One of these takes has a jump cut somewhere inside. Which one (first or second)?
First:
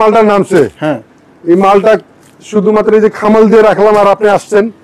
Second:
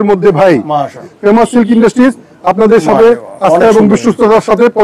second